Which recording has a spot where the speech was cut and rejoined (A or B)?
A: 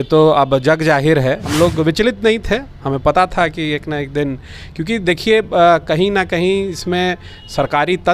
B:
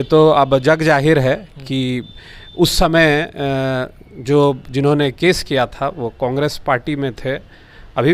A